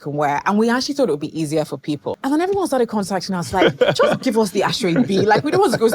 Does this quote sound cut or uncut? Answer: cut